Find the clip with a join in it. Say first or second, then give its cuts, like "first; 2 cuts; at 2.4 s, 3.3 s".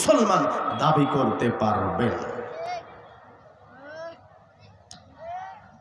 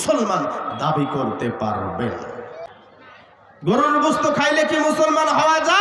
second; 1 cut; at 2.6 s